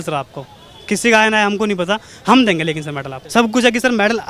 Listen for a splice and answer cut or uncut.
cut